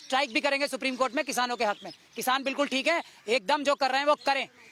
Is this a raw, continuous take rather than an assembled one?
yes; 0 cuts

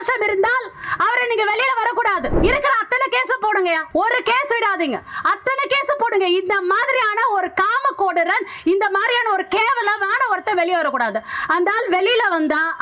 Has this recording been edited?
yes; 2 cuts; at 2.3 s, 3.8 s

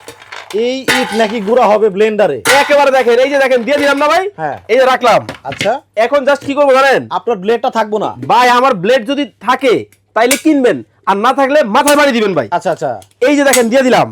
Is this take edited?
no; 0 cuts

